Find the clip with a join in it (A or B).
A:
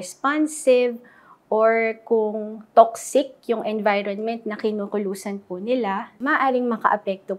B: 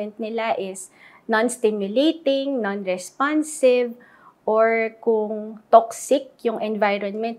A